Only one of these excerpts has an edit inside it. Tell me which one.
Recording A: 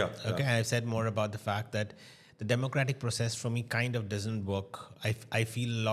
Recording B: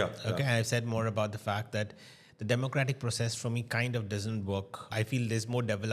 B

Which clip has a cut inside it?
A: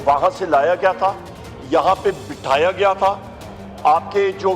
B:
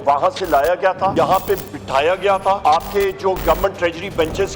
B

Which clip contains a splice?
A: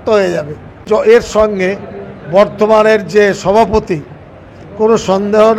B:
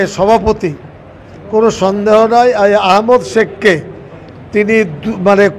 A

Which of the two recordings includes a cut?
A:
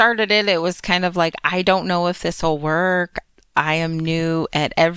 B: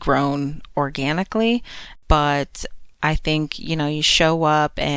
B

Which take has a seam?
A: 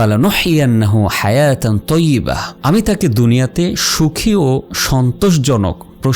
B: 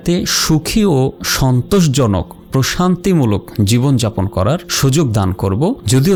A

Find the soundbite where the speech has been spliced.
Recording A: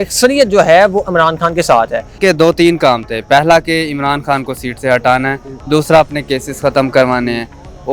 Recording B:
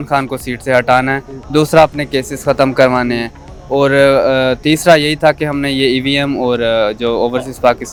A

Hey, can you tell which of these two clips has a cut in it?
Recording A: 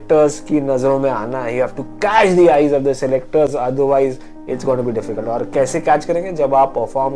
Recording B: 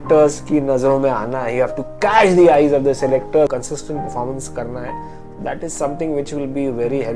B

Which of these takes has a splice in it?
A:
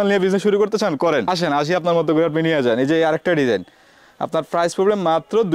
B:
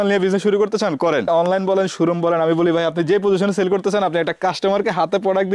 B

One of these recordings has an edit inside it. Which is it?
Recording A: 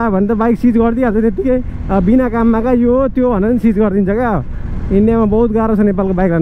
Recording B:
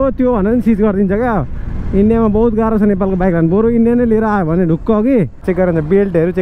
B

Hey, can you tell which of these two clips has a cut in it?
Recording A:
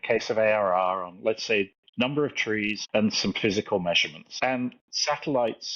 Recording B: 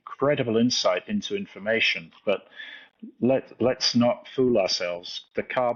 A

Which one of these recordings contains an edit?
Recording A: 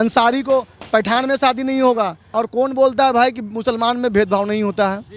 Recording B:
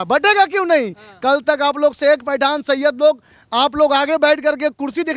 A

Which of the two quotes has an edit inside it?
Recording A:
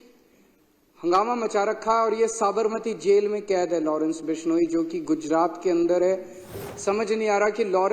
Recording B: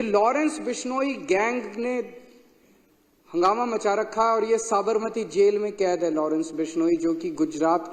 A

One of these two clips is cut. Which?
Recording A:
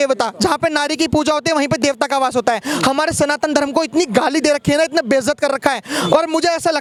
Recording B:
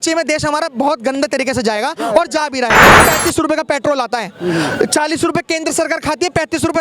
B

